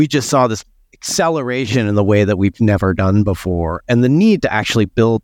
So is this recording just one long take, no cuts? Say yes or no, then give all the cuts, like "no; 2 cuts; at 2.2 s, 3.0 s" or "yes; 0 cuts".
yes; 0 cuts